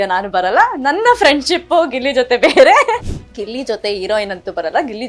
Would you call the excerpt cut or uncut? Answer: cut